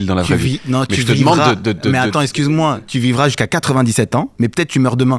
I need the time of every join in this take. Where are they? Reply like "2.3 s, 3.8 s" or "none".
2.7 s, 4.3 s